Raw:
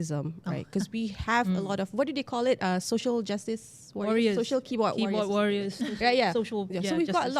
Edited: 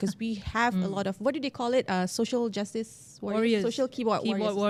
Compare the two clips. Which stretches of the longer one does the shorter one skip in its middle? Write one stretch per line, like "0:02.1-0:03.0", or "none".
none